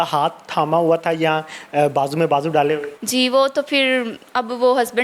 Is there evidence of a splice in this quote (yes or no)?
yes